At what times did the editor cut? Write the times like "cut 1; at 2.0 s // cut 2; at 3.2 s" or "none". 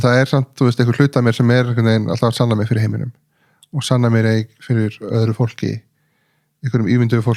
none